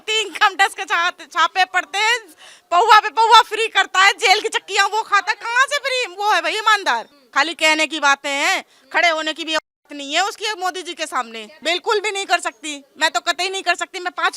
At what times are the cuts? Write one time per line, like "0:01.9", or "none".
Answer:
0:07.2
0:11.4